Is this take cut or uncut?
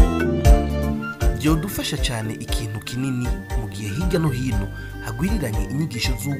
uncut